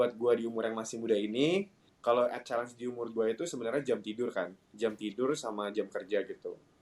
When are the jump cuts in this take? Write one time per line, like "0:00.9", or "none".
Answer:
0:01.8